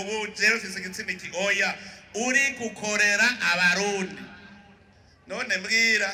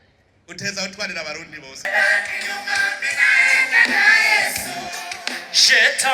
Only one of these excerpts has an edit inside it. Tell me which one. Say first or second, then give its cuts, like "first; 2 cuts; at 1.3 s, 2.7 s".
second; 1 cut; at 1.9 s